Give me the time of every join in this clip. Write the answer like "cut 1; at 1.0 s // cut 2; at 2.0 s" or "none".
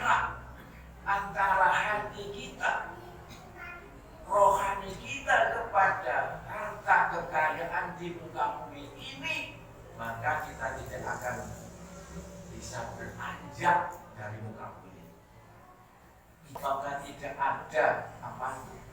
cut 1; at 16.6 s